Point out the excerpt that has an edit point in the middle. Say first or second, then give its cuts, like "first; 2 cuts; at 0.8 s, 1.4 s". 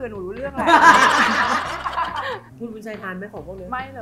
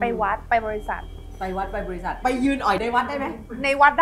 first; 1 cut; at 2.5 s